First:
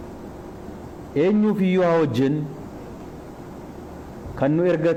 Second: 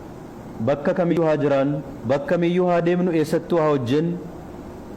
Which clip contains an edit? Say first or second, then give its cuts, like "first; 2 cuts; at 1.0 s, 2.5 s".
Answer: second; 1 cut; at 1.1 s